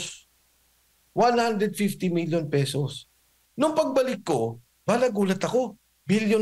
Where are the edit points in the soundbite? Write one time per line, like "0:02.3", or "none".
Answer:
0:03.4